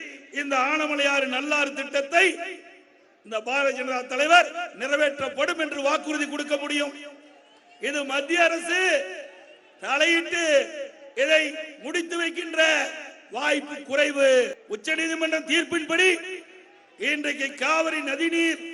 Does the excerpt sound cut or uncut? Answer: cut